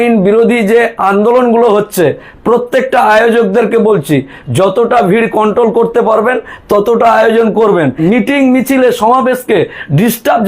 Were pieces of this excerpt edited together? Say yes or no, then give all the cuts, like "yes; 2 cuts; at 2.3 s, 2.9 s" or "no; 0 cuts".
yes; 1 cut; at 8.0 s